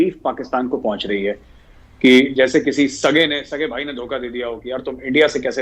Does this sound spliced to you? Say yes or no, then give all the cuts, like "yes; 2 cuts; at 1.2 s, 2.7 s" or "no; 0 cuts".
no; 0 cuts